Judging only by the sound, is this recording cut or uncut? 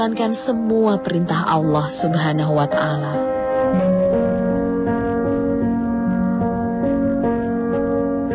uncut